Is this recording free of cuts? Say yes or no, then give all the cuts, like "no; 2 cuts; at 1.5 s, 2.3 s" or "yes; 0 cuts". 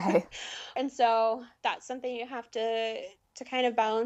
no; 2 cuts; at 0.8 s, 1.5 s